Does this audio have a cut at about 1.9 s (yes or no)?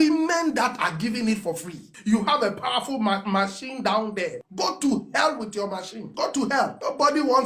yes